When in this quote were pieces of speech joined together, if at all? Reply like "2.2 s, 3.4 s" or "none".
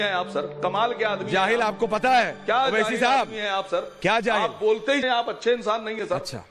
5.0 s